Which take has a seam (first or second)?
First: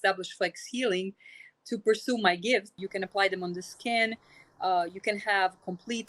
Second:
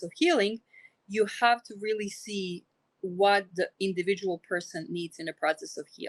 first